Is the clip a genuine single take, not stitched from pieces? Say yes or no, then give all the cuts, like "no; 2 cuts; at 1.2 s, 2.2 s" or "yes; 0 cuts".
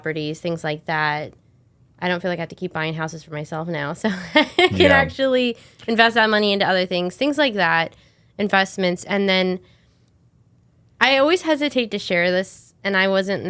yes; 0 cuts